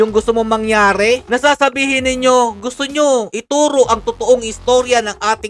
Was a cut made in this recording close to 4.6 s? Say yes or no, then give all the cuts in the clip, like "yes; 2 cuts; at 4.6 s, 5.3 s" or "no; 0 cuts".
no; 0 cuts